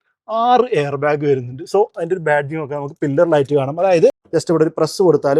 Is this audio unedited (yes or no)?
no